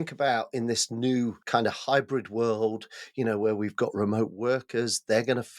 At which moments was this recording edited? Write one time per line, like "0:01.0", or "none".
0:01.4